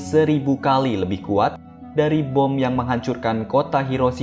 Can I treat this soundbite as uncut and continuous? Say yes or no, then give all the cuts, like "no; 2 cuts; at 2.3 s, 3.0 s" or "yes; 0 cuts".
yes; 0 cuts